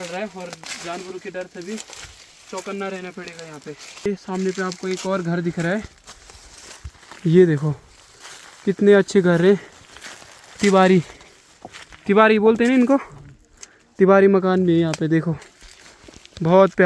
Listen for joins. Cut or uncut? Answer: uncut